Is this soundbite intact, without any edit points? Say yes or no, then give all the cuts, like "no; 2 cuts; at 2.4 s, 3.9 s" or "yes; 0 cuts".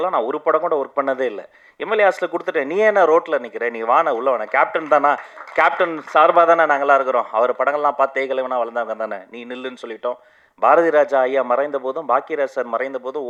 yes; 0 cuts